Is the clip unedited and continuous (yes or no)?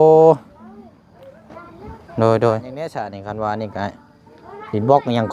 no